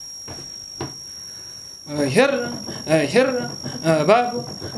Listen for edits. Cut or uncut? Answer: cut